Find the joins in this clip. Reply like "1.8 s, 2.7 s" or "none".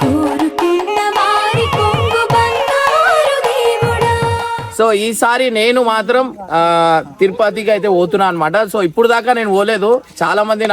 none